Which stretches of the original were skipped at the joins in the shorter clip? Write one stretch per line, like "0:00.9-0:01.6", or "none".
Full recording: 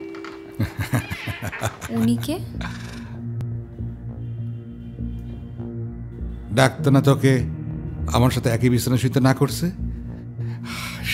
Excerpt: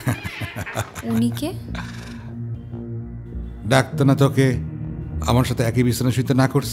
0:03.4-0:05.4